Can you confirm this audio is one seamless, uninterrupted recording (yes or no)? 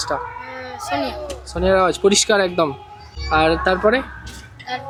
yes